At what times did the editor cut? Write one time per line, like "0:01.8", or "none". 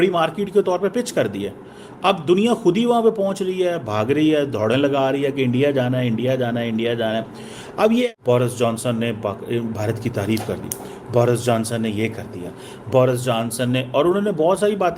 0:08.1

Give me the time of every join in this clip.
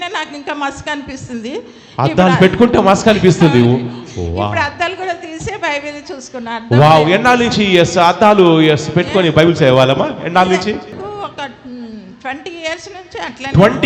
0:11.0

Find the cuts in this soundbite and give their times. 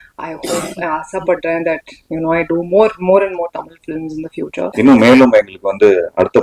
0:04.6

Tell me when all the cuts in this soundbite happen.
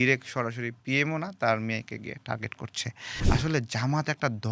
0:03.1

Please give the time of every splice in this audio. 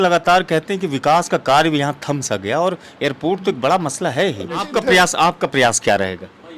0:04.7

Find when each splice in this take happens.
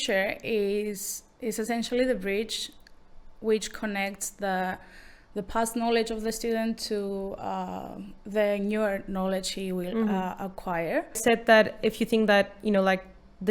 0:11.2

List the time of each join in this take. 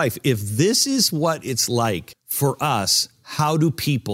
0:02.2

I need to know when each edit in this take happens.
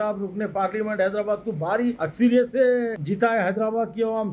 0:02.0
0:03.0

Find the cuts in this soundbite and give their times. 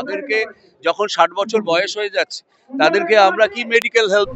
none

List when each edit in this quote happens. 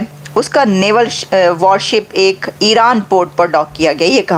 none

